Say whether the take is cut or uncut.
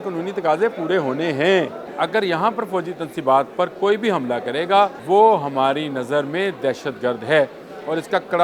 cut